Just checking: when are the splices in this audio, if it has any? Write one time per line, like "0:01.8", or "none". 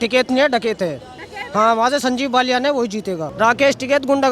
0:03.2